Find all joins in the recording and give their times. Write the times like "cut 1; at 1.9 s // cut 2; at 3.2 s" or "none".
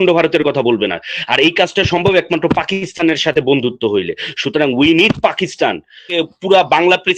cut 1; at 6.1 s